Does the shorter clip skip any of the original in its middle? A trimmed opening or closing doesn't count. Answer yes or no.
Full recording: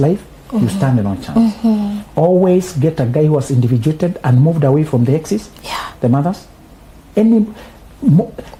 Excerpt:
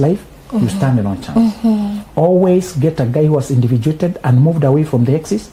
no